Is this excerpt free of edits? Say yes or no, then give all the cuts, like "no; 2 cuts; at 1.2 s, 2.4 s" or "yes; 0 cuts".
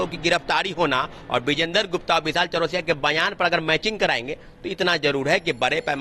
yes; 0 cuts